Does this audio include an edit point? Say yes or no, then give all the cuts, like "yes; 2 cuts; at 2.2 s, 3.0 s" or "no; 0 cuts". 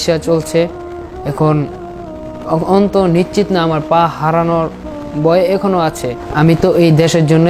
yes; 1 cut; at 6.1 s